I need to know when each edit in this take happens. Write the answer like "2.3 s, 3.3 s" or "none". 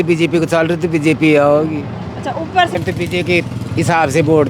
2.8 s